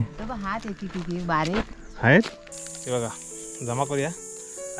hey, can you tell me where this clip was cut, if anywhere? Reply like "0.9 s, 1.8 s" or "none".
2.4 s